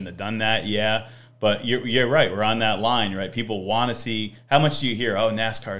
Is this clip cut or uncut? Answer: uncut